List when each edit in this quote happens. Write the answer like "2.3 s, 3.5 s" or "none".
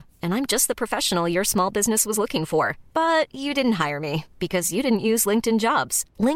none